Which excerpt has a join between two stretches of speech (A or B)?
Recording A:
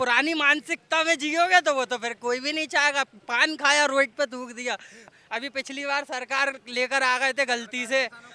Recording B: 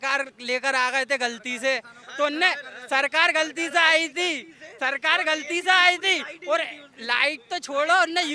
A